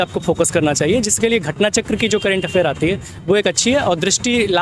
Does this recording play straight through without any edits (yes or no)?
yes